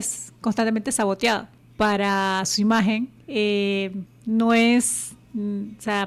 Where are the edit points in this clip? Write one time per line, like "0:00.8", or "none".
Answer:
0:01.6
0:04.1